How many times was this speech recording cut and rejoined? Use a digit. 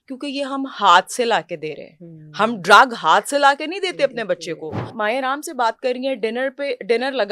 1